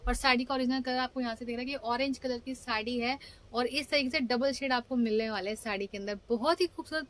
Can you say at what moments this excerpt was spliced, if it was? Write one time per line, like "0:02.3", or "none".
none